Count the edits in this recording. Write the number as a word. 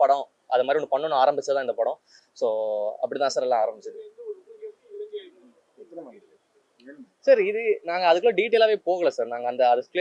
zero